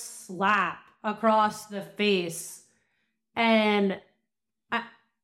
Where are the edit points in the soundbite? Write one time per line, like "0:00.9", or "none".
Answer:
none